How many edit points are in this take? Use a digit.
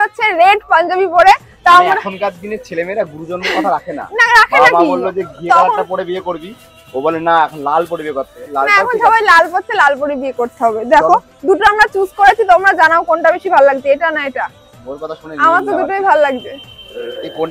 0